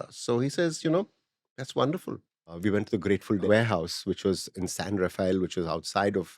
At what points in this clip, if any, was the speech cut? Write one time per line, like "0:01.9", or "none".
0:02.5
0:03.5